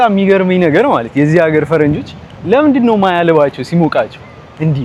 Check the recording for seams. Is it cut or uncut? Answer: uncut